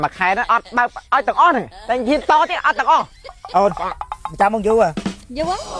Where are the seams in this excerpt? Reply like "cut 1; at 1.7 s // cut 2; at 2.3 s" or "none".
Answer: cut 1; at 3.2 s

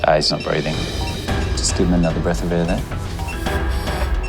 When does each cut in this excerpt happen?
none

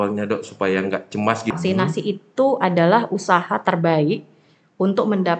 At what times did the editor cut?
cut 1; at 1.5 s

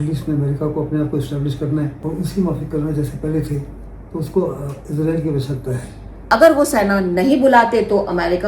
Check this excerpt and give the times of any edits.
cut 1; at 2.0 s // cut 2; at 6.1 s

